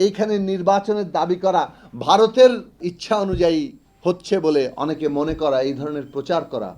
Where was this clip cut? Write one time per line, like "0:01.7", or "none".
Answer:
0:02.9